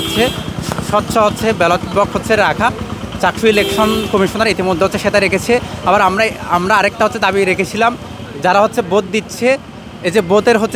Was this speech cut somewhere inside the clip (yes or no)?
no